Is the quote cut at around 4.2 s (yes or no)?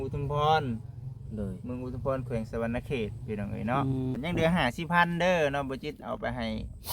yes